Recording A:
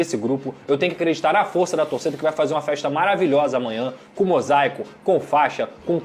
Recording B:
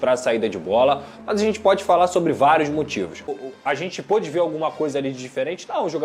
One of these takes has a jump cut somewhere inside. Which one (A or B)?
B